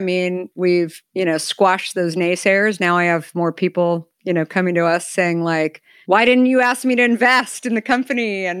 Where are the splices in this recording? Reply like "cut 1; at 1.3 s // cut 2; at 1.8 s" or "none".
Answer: cut 1; at 1.0 s // cut 2; at 5.9 s